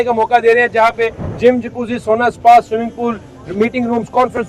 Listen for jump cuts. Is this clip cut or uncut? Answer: uncut